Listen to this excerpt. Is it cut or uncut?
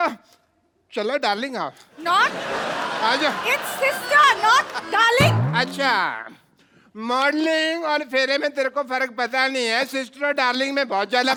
uncut